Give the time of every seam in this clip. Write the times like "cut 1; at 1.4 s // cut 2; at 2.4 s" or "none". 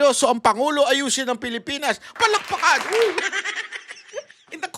cut 1; at 3.2 s